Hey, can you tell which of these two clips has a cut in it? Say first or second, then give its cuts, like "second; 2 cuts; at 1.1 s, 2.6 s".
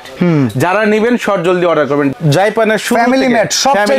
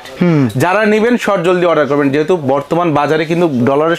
first; 1 cut; at 2.1 s